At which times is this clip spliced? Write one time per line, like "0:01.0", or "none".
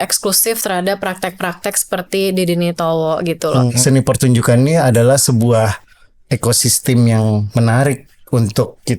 0:03.7